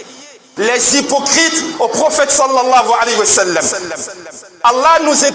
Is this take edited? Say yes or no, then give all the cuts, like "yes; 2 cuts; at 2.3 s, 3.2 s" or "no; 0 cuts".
no; 0 cuts